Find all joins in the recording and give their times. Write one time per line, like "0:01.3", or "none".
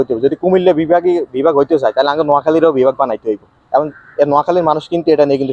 none